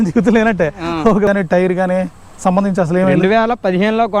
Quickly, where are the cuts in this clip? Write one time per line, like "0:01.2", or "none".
0:01.3